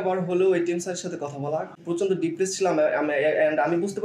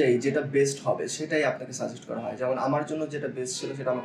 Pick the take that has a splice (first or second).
first